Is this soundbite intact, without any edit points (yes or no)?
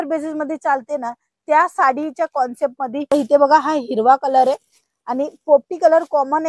no